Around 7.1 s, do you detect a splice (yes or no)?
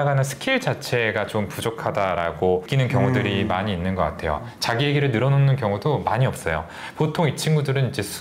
no